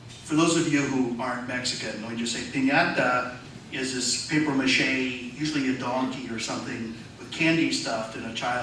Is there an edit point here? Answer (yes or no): yes